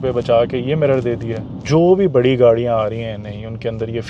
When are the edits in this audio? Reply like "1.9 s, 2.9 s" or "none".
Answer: 1.5 s